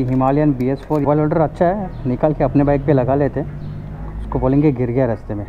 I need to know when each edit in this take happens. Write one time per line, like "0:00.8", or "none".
0:01.0